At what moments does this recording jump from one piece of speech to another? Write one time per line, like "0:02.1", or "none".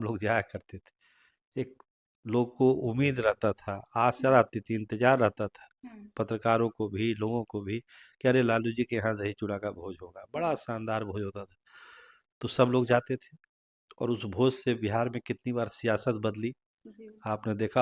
none